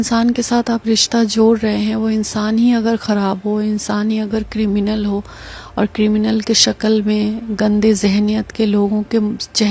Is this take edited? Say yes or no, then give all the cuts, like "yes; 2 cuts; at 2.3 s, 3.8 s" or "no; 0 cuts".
no; 0 cuts